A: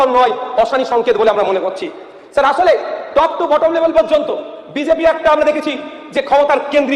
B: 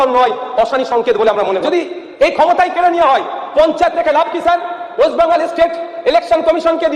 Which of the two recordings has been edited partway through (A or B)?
B